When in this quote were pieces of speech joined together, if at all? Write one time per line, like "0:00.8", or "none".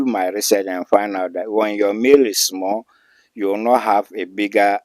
none